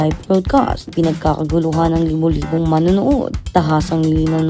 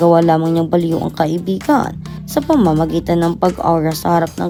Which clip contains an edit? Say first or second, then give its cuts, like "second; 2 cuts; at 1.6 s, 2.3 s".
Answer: first; 2 cuts; at 0.9 s, 3.4 s